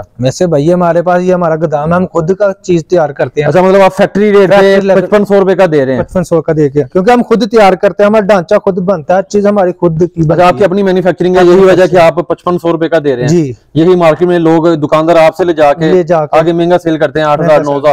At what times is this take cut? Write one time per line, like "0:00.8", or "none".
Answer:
none